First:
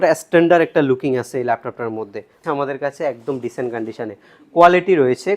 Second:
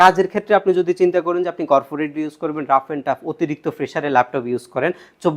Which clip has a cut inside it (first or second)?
first